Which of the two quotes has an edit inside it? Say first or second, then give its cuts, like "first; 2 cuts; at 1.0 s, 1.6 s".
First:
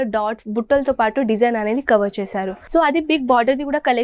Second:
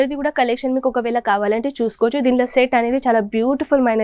first; 1 cut; at 2.5 s